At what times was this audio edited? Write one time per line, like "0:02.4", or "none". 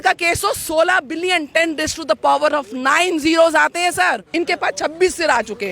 0:04.3